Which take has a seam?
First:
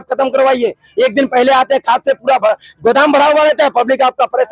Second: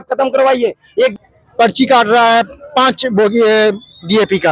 second; 1 cut; at 1.1 s

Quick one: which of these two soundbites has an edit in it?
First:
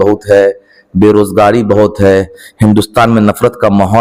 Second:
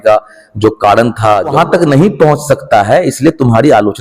second; 1 cut; at 1.5 s

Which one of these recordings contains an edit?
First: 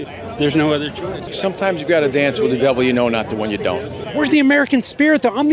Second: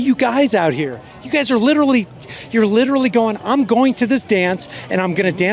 first; 2 cuts; at 1.3 s, 4.0 s

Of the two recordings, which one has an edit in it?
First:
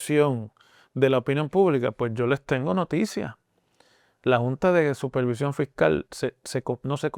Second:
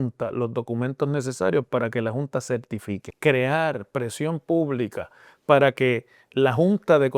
second; 1 cut; at 3.0 s

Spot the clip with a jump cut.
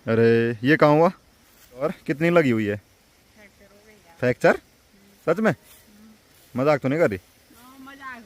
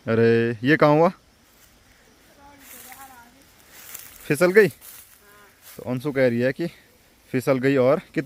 first; 1 cut; at 1.8 s

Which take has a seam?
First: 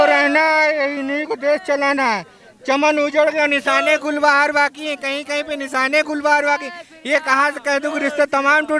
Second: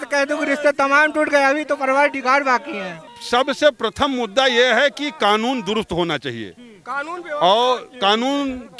second; 1 cut; at 3.1 s

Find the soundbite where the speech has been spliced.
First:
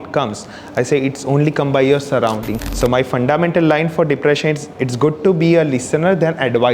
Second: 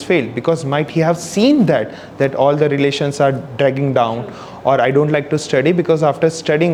first; 1 cut; at 2.6 s

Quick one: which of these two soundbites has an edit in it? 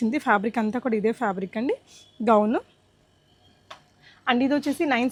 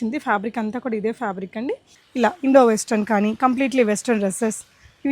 second; 1 cut; at 2.0 s

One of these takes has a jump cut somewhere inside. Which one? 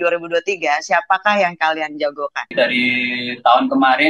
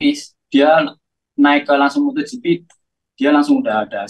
first; 1 cut; at 2.5 s

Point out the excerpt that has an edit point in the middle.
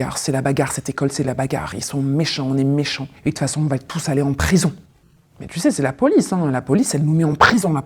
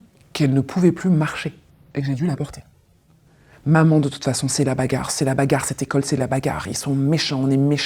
second; 1 cut; at 3.6 s

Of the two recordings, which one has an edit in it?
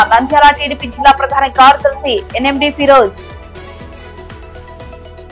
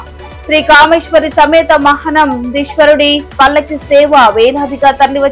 first; 1 cut; at 3.5 s

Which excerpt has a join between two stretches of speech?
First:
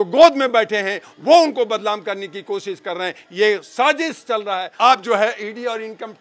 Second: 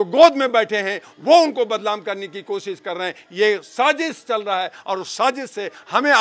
first; 1 cut; at 4.7 s

